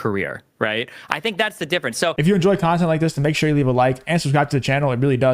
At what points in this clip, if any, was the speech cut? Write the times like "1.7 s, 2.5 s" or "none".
2.2 s